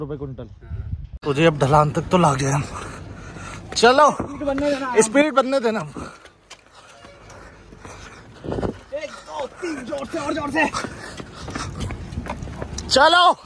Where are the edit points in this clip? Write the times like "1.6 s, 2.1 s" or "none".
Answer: 1.1 s